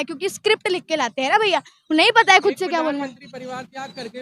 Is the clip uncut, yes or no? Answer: yes